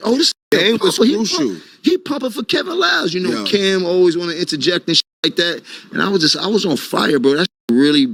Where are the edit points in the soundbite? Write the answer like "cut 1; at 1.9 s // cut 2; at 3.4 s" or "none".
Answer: none